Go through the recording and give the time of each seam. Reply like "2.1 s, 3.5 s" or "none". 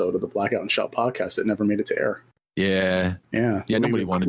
2.4 s